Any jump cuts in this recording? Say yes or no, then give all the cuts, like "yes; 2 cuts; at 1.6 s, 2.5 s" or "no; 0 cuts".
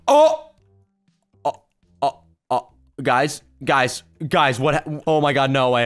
yes; 1 cut; at 4.9 s